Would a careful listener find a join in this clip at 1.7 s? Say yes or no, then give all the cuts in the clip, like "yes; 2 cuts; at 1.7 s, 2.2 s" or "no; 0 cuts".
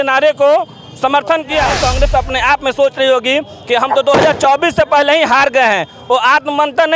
yes; 1 cut; at 1.7 s